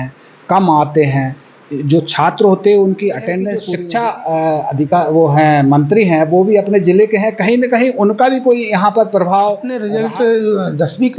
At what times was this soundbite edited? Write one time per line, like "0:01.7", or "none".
0:03.7
0:09.9